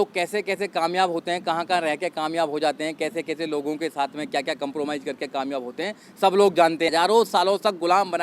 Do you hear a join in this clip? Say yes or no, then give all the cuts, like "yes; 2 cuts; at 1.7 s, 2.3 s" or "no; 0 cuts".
yes; 1 cut; at 6.9 s